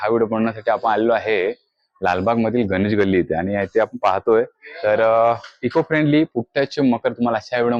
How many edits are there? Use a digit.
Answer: 0